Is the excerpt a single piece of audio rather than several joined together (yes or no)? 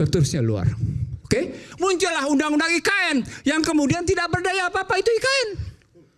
no